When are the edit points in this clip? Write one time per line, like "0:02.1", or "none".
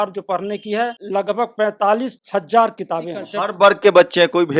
0:00.9
0:02.2
0:03.3